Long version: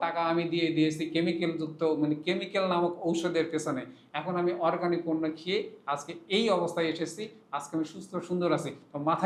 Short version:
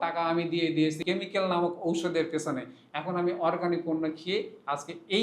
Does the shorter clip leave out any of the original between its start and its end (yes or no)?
yes